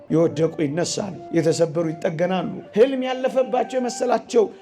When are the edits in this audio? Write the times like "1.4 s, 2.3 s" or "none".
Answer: 1.1 s, 2.6 s